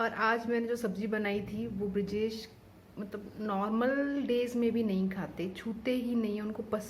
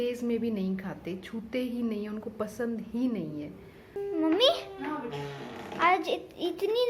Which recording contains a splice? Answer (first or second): second